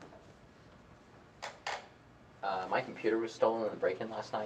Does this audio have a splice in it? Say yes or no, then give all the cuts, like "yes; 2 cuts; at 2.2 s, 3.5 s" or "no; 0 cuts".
no; 0 cuts